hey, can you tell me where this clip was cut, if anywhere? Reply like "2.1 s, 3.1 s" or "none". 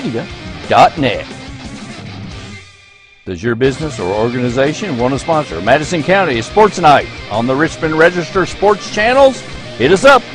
none

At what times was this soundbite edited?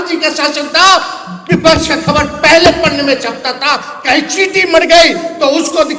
none

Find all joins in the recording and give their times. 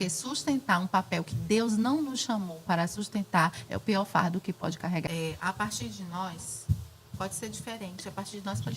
5.0 s

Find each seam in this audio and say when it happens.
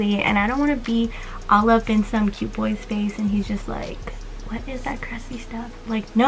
none

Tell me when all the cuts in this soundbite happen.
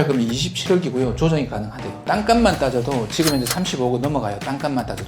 2.0 s

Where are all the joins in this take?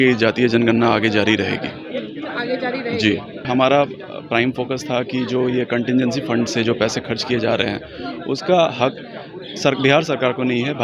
3.5 s

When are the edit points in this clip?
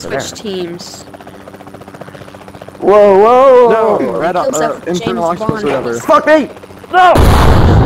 none

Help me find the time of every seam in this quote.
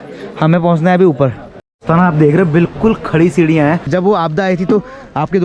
3.9 s

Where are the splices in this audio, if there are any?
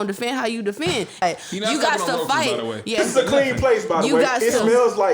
1.2 s, 3.0 s

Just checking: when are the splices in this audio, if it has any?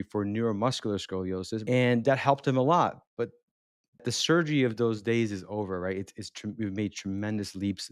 1.6 s, 4.0 s

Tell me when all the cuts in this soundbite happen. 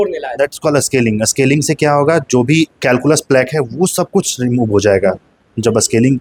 none

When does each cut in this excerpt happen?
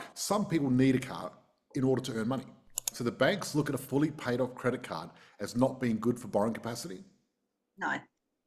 2.9 s

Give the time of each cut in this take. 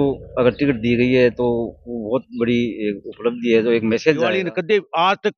4.2 s

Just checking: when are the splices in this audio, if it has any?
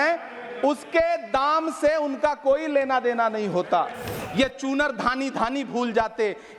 4.2 s

